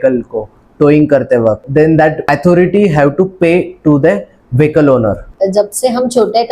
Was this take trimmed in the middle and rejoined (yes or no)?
yes